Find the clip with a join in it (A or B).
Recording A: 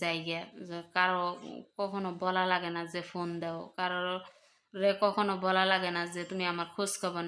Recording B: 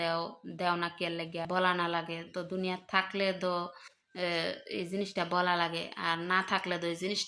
B